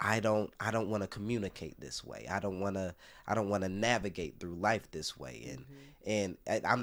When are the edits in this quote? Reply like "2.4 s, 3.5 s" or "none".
none